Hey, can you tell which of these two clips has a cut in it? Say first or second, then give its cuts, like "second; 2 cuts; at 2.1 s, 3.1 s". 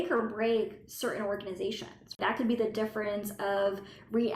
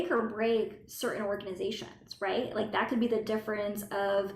first; 1 cut; at 2.2 s